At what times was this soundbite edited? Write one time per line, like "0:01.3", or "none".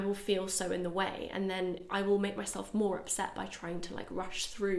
none